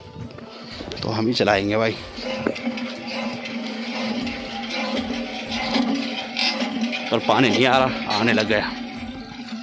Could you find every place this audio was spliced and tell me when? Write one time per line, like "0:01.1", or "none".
none